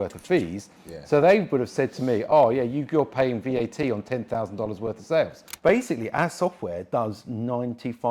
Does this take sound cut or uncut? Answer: cut